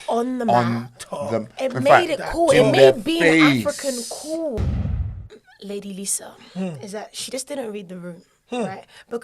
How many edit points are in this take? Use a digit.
1